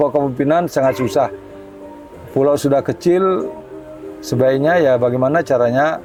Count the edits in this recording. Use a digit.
0